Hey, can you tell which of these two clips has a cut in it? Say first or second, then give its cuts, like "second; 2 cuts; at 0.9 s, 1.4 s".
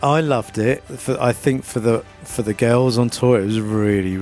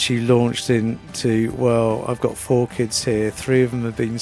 first; 1 cut; at 0.9 s